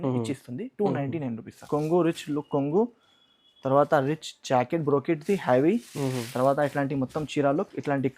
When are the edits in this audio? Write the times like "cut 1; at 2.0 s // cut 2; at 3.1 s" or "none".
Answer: cut 1; at 1.6 s